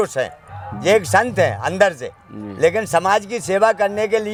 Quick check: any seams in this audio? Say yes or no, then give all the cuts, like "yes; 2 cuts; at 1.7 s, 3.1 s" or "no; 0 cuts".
no; 0 cuts